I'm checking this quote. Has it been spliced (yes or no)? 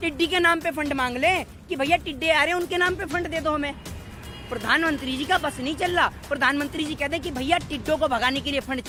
no